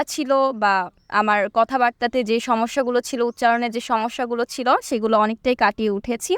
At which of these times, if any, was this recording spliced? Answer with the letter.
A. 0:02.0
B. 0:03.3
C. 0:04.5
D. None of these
D